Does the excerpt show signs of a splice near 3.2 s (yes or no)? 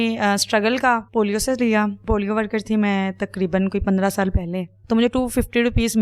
no